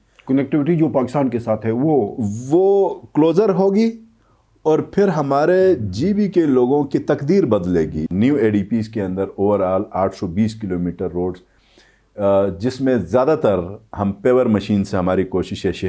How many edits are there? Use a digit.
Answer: 1